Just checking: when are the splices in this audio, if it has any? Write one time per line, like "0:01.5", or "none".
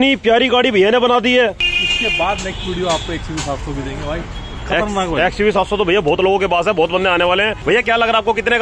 0:07.5